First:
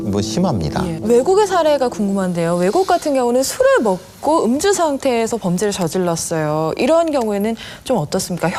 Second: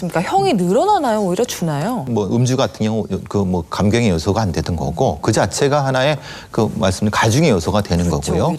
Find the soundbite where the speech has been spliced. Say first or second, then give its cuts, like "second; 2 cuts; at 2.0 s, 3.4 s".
second; 1 cut; at 2.0 s